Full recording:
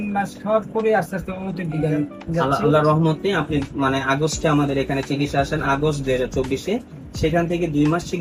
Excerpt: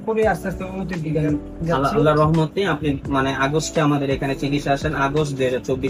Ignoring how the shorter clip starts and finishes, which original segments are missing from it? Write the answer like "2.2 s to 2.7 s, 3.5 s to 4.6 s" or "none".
none